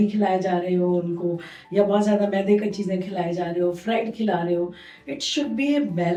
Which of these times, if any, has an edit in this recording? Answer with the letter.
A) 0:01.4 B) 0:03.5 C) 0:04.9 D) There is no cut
D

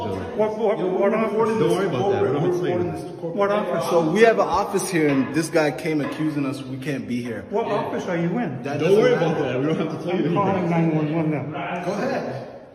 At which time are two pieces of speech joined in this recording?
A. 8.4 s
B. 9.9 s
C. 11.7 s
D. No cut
D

